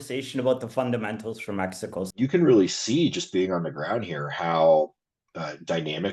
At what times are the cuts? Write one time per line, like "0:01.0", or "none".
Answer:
0:02.1